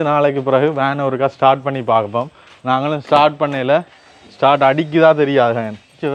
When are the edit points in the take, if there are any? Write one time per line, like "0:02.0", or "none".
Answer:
none